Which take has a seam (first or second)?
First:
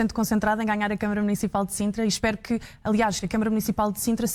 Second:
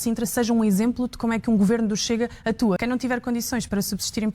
second